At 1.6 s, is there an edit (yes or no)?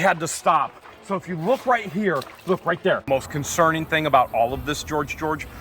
no